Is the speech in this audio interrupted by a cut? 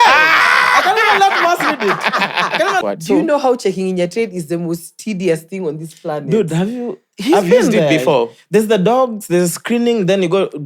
yes; 1 cut; at 2.8 s

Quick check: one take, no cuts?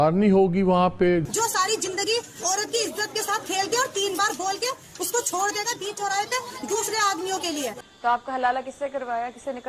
no; 2 cuts; at 1.3 s, 7.9 s

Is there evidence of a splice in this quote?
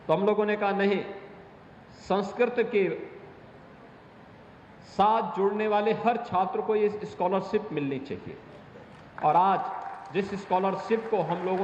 no; 0 cuts

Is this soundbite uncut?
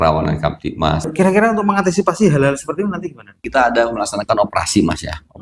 no; 2 cuts; at 1.1 s, 3.5 s

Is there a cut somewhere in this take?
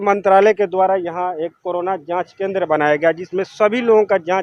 no; 0 cuts

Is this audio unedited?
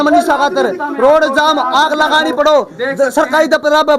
yes; 0 cuts

